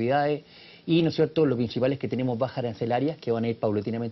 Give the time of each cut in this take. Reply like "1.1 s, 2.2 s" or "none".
none